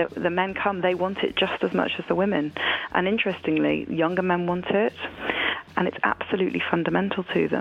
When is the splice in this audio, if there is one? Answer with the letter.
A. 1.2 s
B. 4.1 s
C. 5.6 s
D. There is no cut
C